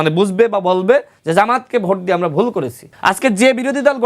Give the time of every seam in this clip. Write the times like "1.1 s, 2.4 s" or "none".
2.8 s